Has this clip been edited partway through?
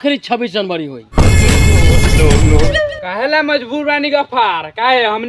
yes; 2 cuts; at 1.3 s, 2.7 s

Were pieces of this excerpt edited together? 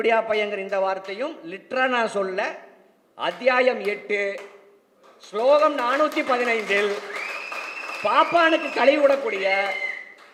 no; 0 cuts

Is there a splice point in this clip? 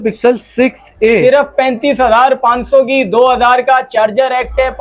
no; 0 cuts

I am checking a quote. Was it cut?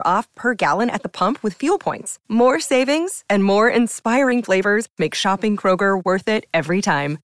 no; 0 cuts

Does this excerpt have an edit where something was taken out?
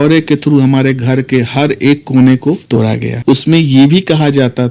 no; 0 cuts

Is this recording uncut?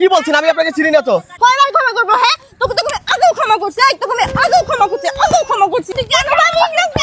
no; 2 cuts; at 1.3 s, 6.0 s

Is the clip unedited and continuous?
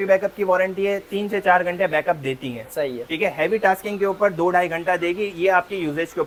yes; 0 cuts

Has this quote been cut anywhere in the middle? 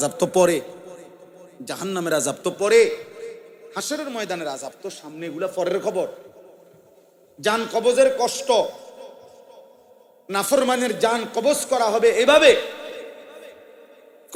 no; 0 cuts

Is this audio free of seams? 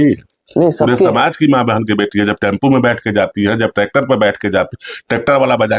yes; 0 cuts

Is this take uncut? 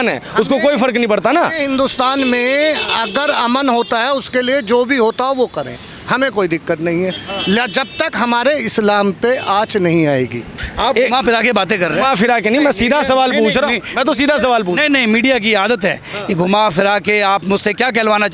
no; 1 cut; at 10.5 s

